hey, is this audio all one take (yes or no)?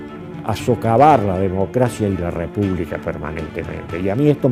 yes